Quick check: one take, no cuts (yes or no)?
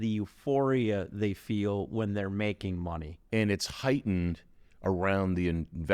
no